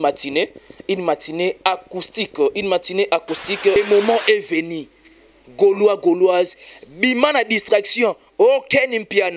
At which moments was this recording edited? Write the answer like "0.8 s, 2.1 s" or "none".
3.8 s

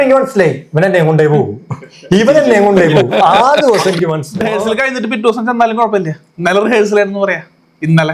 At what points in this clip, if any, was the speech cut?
4.3 s

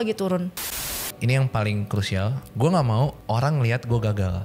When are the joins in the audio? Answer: 1.0 s, 2.4 s, 3.2 s

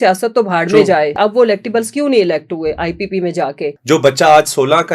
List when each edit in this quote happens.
1.2 s, 3.8 s

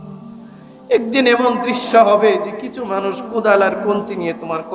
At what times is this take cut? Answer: none

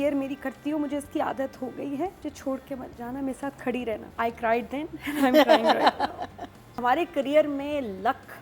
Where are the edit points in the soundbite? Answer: 2.2 s, 4.1 s, 6.8 s

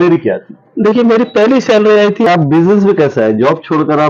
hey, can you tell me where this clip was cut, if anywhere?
2.3 s

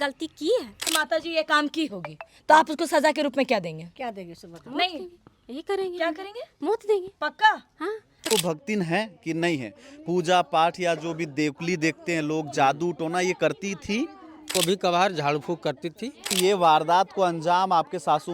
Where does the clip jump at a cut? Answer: 0.8 s, 8.3 s, 14.5 s, 16.3 s

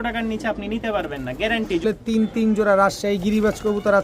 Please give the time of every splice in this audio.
1.8 s

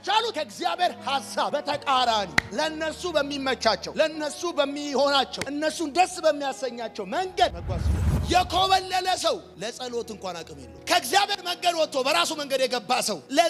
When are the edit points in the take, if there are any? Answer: 8.2 s

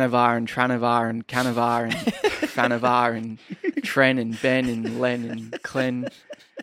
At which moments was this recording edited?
none

